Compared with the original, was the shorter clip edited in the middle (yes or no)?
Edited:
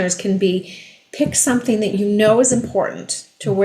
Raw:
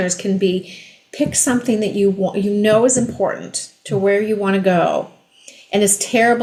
yes